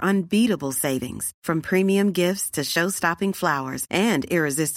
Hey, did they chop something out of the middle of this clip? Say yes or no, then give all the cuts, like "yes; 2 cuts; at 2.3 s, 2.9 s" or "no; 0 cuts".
no; 0 cuts